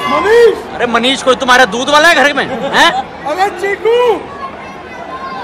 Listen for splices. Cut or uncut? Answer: uncut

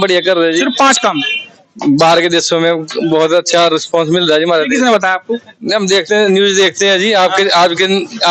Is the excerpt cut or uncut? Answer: uncut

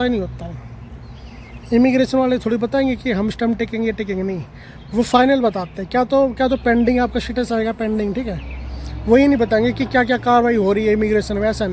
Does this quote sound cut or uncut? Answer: uncut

